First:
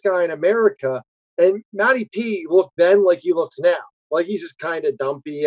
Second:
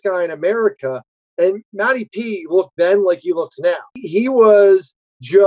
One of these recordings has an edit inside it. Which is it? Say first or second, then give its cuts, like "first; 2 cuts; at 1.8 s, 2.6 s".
second; 1 cut; at 4.0 s